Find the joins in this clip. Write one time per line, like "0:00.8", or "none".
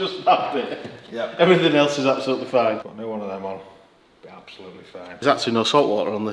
0:02.9
0:05.2